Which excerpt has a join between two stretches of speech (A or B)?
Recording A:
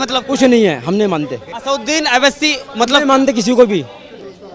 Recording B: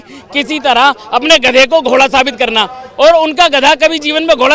A